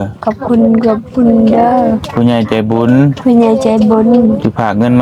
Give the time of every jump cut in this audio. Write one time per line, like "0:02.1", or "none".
none